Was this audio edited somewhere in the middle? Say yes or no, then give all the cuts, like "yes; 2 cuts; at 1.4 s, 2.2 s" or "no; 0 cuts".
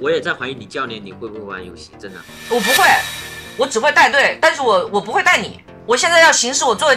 yes; 1 cut; at 5.7 s